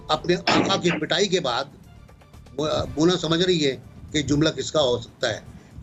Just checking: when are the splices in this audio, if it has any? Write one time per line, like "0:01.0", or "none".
none